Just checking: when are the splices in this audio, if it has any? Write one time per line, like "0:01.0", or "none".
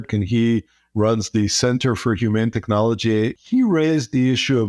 0:03.4